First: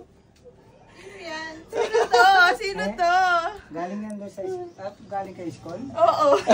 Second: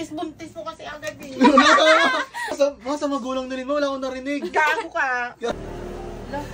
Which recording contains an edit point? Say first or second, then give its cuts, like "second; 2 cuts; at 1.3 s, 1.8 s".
second; 2 cuts; at 2.5 s, 5.5 s